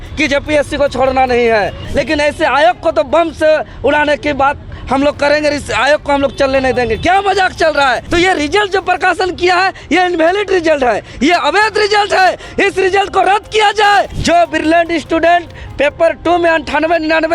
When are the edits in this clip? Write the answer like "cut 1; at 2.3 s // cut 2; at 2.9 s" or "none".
cut 1; at 1.8 s // cut 2; at 8.0 s // cut 3; at 14.2 s